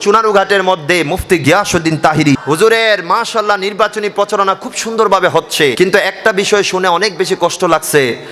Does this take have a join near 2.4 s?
yes; 2 cuts; at 2.4 s, 5.7 s

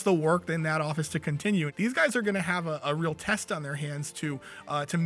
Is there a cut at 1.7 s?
yes; 1 cut; at 1.7 s

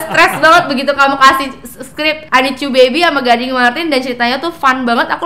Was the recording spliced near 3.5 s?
no; 1 cut; at 2.2 s

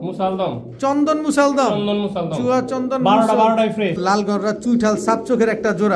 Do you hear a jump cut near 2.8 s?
no; 1 cut; at 4.0 s

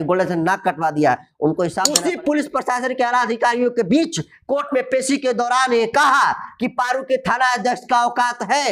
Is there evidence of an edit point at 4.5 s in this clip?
no; 1 cut; at 1.9 s

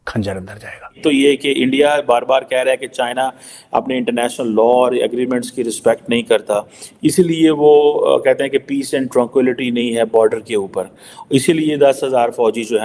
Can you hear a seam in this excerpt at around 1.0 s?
yes; 1 cut; at 1.0 s

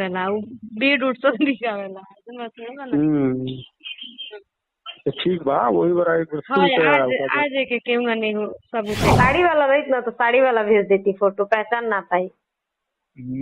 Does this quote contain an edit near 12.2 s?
no; 1 cut; at 9.1 s

